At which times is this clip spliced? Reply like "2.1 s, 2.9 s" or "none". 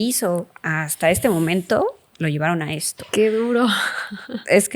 none